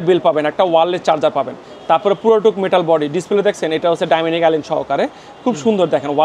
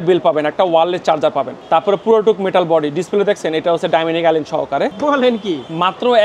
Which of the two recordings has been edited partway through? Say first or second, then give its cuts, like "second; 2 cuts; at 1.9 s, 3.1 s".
second; 2 cuts; at 1.5 s, 4.9 s